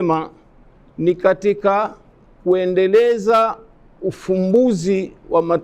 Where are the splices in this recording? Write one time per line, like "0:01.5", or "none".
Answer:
none

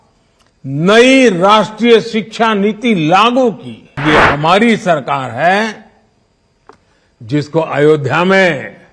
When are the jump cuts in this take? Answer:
0:04.0

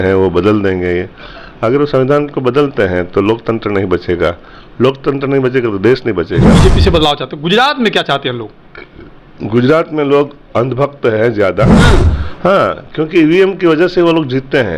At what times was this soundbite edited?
0:06.5
0:11.8

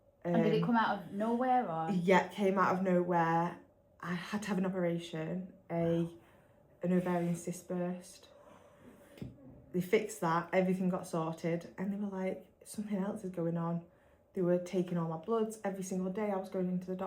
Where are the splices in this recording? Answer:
0:09.2

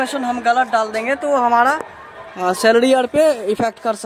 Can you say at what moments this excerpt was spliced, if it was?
none

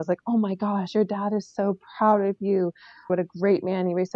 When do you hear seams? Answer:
0:03.1

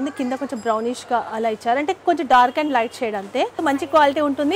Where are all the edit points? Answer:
0:03.6

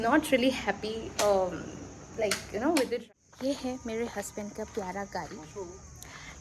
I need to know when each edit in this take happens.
0:03.0

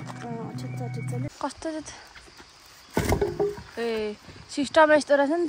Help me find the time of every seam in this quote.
0:01.3

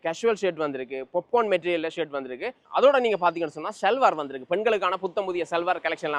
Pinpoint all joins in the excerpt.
none

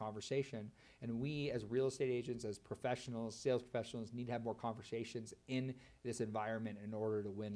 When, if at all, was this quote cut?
none

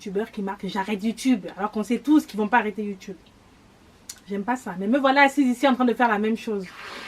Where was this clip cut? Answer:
none

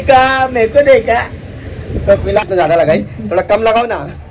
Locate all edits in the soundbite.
0:02.5

